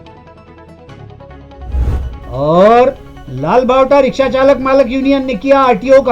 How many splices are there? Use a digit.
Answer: 1